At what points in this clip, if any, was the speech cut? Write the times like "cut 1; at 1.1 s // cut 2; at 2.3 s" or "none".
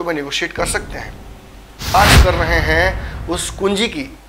cut 1; at 1.9 s